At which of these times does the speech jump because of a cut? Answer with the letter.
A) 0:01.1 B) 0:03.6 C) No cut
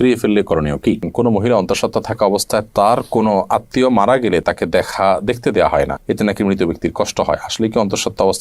A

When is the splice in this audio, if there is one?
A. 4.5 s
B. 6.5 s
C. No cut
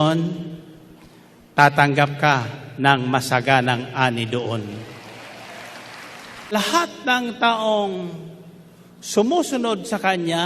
B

